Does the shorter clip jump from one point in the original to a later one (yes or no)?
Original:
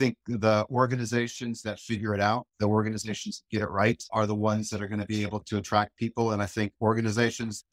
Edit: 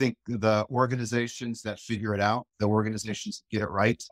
no